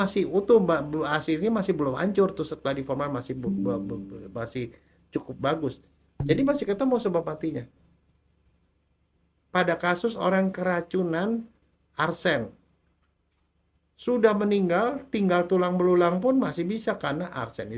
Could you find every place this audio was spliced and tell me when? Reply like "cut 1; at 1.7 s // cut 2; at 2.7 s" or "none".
none